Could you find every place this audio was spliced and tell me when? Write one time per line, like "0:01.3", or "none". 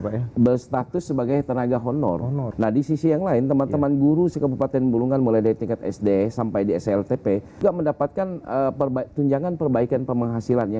0:02.4
0:07.6

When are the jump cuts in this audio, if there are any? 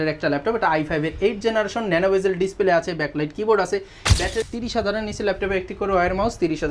0:04.4

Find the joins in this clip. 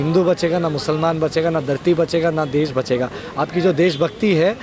none

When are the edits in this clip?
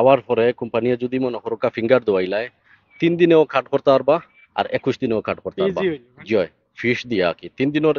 none

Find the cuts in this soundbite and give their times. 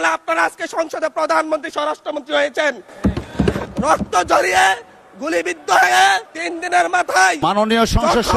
none

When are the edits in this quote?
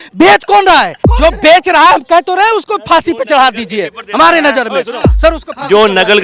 0:01.0

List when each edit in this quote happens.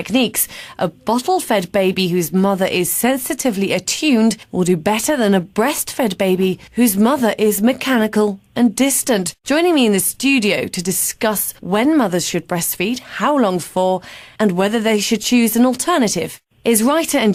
none

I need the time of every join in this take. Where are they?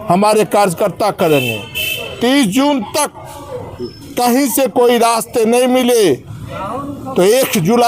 none

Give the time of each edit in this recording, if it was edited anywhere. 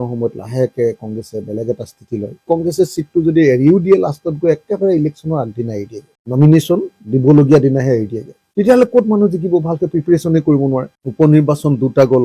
0:02.4
0:11.0

